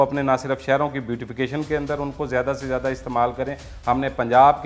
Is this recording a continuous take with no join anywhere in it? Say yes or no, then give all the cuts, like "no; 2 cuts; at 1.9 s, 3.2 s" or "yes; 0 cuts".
no; 1 cut; at 3.7 s